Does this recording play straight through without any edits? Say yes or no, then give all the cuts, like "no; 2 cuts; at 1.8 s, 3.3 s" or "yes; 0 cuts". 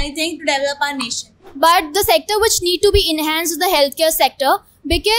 no; 1 cut; at 1.4 s